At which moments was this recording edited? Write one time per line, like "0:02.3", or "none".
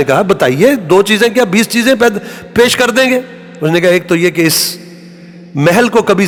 none